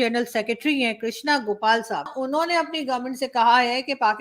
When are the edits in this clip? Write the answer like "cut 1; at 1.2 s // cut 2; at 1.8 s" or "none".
cut 1; at 2.1 s